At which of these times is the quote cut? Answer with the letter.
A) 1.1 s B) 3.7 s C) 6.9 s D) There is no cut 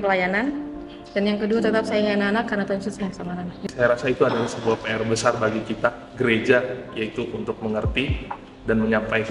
B